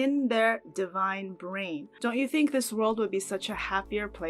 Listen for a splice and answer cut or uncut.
cut